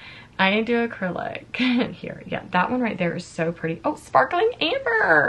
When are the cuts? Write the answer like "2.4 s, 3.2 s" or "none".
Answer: 2.0 s